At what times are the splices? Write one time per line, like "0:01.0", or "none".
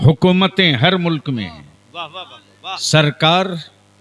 none